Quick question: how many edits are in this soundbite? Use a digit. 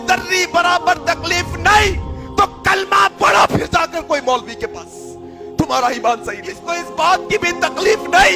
1